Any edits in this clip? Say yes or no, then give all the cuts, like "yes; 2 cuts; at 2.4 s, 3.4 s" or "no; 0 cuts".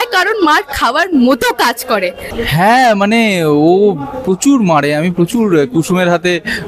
yes; 1 cut; at 2.2 s